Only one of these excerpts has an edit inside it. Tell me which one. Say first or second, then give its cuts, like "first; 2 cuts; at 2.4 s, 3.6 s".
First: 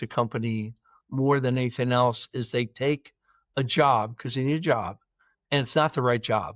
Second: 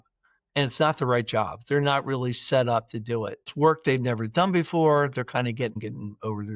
second; 2 cuts; at 3.4 s, 5.8 s